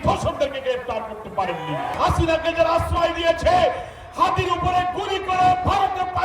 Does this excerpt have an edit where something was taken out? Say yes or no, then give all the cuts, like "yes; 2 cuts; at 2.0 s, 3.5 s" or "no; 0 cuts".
yes; 1 cut; at 2.0 s